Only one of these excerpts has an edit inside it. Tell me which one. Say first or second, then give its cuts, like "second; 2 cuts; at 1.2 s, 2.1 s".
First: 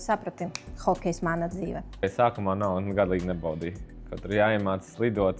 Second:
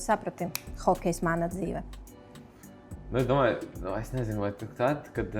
first; 1 cut; at 2.0 s